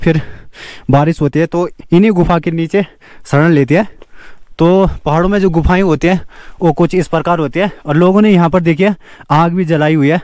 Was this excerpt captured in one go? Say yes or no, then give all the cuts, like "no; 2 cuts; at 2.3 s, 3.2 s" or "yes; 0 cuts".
yes; 0 cuts